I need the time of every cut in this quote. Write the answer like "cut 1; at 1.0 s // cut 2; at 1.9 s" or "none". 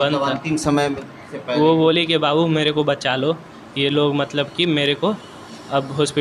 none